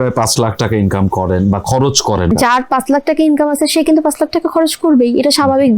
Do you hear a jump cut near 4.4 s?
no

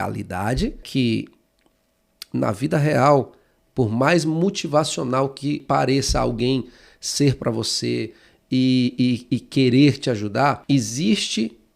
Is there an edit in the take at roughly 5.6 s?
yes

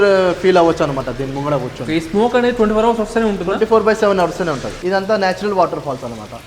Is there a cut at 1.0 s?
no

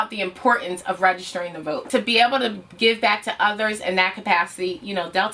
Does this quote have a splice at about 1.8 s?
yes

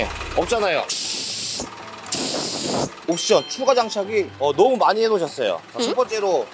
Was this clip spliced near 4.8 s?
no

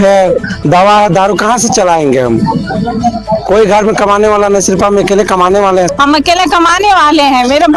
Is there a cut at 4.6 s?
no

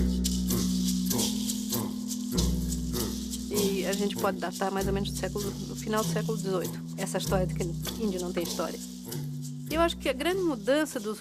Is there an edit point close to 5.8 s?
yes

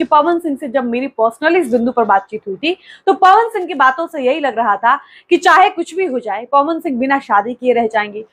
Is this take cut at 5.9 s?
no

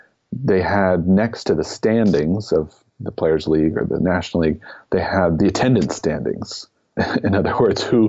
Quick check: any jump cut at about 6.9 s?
yes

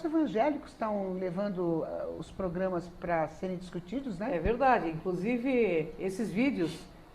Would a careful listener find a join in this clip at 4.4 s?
yes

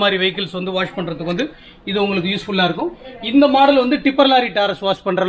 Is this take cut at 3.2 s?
no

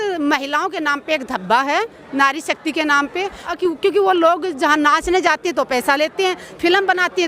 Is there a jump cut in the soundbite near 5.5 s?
no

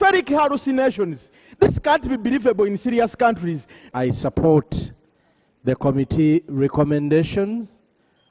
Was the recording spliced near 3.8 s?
yes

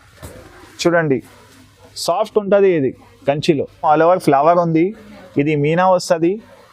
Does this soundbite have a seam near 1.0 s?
no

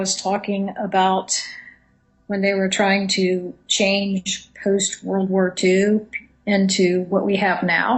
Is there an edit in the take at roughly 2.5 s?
yes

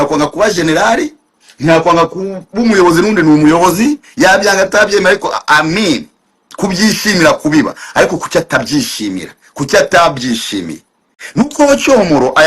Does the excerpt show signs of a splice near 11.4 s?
no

